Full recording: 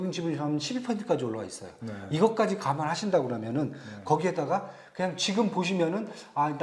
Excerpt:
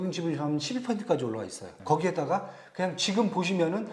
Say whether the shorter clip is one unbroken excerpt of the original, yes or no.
no